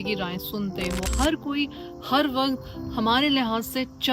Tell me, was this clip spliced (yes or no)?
yes